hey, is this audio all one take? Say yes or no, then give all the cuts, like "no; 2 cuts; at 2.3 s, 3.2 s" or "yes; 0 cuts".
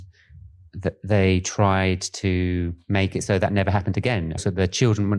no; 2 cuts; at 2.8 s, 4.4 s